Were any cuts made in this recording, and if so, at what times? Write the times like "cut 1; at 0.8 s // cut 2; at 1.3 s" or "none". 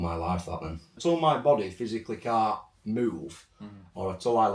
cut 1; at 0.9 s